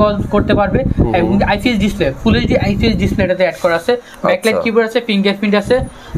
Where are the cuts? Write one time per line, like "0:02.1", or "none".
none